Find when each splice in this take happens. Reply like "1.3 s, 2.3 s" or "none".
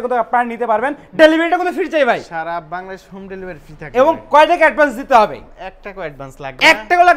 none